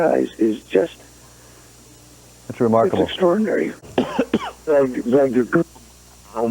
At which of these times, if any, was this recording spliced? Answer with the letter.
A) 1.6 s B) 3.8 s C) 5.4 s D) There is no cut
B